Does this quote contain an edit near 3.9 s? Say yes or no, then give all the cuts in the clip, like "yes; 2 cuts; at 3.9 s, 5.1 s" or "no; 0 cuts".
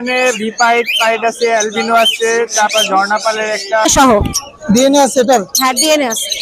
yes; 1 cut; at 3.9 s